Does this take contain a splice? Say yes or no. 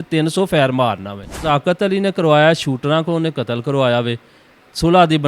yes